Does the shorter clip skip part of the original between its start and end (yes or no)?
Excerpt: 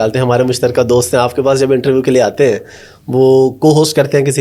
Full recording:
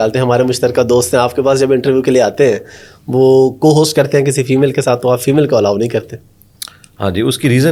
no